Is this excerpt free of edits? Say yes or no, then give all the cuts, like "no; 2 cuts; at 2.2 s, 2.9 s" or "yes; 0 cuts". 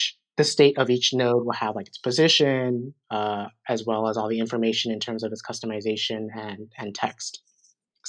yes; 0 cuts